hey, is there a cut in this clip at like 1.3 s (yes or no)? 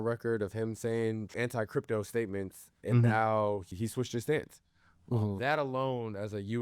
yes